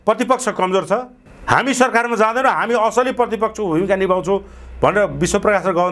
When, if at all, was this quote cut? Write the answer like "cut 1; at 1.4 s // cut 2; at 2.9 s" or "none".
none